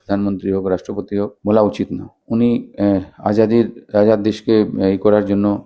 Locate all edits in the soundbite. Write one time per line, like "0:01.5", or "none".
none